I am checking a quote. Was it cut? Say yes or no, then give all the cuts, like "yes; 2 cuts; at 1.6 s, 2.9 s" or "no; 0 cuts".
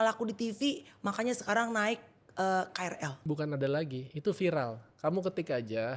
yes; 1 cut; at 3.1 s